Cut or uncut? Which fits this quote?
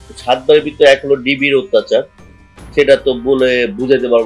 uncut